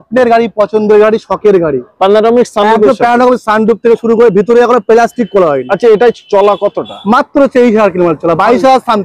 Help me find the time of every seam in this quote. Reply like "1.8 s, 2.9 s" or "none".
none